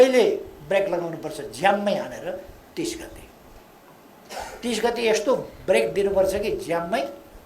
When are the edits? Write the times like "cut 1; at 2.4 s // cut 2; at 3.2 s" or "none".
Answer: none